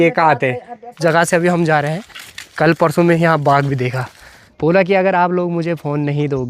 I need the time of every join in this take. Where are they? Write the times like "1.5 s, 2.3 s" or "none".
1.0 s, 4.5 s